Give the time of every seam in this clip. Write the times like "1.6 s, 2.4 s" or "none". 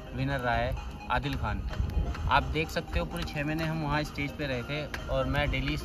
none